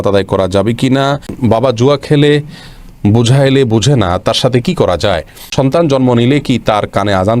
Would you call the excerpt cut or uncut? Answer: cut